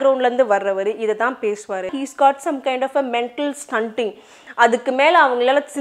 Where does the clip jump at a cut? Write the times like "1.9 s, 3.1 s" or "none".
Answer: 2.0 s